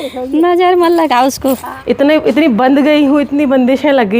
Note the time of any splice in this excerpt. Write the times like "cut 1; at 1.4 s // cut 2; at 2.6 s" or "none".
cut 1; at 1.7 s